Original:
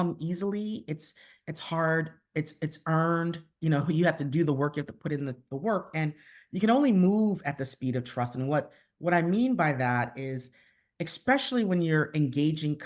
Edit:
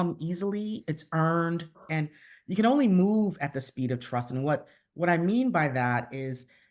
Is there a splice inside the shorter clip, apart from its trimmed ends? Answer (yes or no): yes